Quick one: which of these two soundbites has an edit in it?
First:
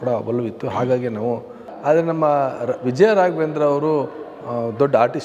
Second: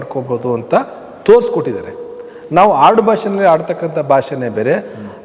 first; 1 cut; at 1.7 s

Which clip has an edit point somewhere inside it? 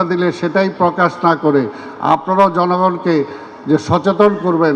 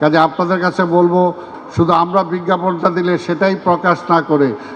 second; 1 cut; at 1.5 s

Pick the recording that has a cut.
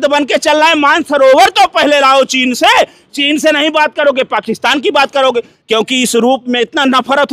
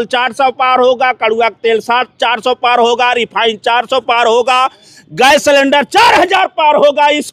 first; 1 cut; at 5.6 s

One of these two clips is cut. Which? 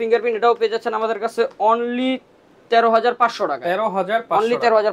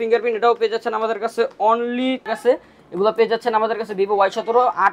second; 1 cut; at 2.3 s

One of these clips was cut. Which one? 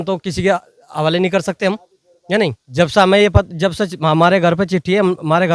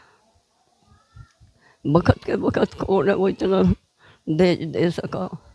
first; 1 cut; at 2.6 s

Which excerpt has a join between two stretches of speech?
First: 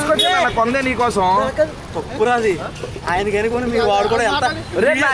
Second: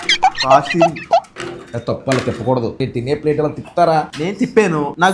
second; 2 cuts; at 1.4 s, 2.8 s

